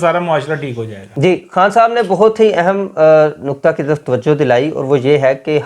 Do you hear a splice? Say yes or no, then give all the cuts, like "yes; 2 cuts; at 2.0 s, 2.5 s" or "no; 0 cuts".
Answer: no; 0 cuts